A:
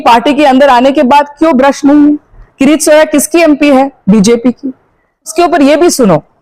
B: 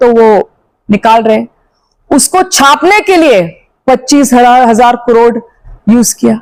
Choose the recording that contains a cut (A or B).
A